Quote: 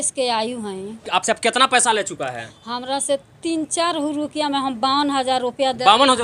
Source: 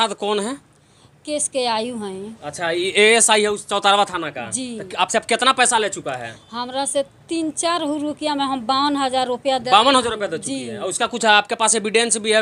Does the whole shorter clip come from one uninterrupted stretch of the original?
no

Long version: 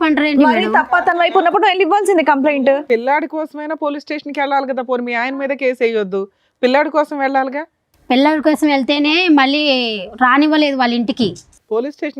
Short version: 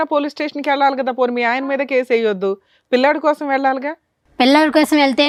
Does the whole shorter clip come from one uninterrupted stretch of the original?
yes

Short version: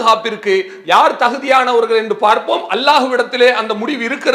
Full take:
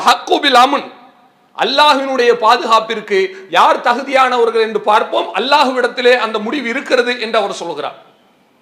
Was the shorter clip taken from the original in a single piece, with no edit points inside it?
yes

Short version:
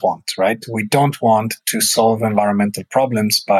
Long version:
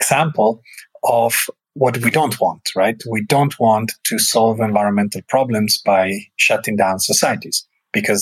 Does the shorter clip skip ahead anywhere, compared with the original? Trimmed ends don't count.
no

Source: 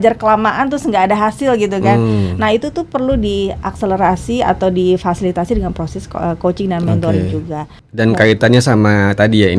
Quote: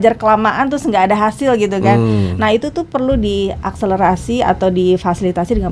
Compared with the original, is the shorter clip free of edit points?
yes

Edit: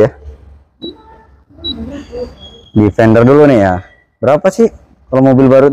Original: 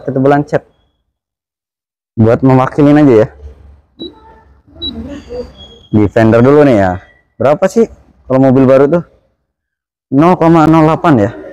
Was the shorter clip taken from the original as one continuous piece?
yes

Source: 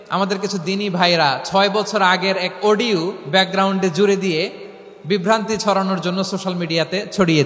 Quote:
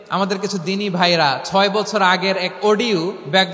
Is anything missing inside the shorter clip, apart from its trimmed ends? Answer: no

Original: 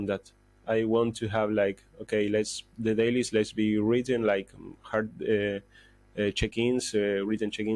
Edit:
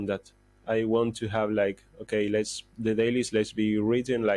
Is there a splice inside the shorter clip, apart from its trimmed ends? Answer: no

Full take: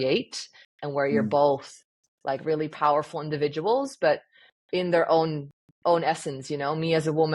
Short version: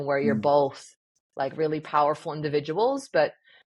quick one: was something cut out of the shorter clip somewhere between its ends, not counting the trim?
no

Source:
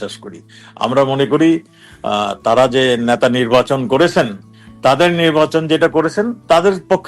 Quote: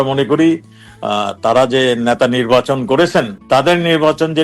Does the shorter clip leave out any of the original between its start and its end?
yes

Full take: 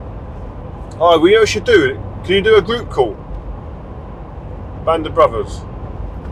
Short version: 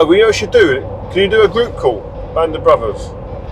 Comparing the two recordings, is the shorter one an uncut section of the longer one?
no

